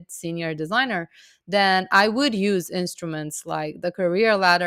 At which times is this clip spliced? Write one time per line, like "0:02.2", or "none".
none